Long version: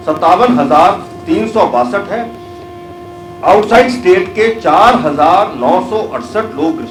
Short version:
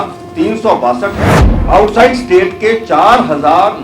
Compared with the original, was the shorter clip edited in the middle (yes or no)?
yes